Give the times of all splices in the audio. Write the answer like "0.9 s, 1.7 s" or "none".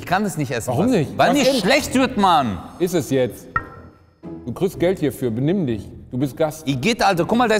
none